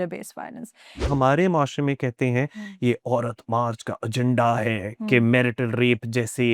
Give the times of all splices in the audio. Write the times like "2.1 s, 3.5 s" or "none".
1.1 s